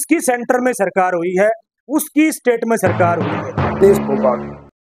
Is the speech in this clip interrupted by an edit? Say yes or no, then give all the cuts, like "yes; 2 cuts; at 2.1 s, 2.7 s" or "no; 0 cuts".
yes; 1 cut; at 3.8 s